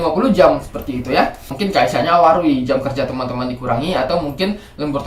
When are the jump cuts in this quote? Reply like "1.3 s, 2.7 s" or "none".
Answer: 1.6 s